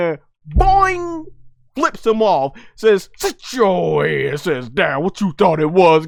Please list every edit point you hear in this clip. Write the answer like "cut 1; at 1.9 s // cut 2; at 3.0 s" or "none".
none